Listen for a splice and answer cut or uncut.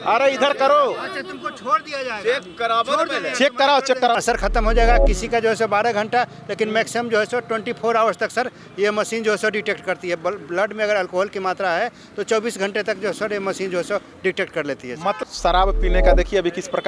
cut